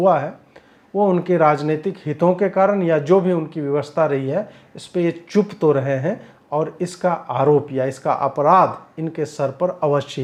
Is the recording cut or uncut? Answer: uncut